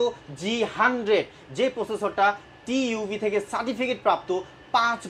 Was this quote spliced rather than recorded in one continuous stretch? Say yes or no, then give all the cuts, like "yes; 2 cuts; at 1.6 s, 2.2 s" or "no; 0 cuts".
no; 0 cuts